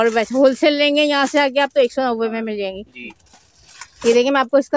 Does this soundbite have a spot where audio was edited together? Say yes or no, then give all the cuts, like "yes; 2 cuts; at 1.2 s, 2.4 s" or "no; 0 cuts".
yes; 1 cut; at 3.1 s